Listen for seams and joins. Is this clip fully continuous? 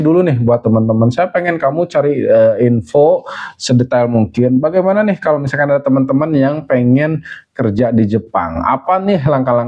yes; 0 cuts

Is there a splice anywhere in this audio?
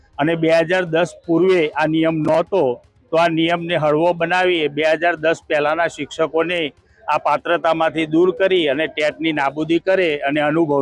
no; 0 cuts

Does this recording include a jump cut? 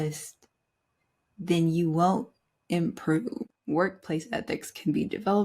yes; 1 cut; at 3.5 s

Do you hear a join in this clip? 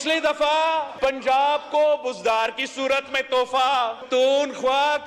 yes; 2 cuts; at 0.9 s, 4.0 s

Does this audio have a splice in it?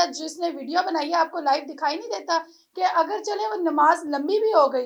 no; 0 cuts

